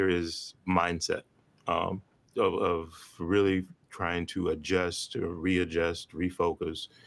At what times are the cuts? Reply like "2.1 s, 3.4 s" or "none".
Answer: none